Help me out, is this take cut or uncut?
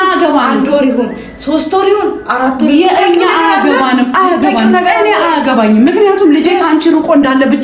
uncut